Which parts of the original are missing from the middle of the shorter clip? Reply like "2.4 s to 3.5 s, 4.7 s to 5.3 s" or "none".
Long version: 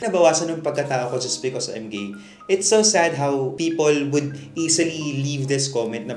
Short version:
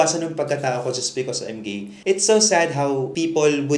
2.2 s to 2.3 s